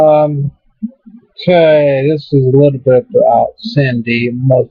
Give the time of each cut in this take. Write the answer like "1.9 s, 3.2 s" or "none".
none